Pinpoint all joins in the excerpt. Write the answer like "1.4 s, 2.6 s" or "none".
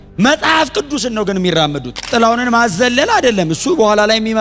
2.1 s